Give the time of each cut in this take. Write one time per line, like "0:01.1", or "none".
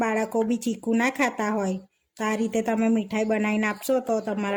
none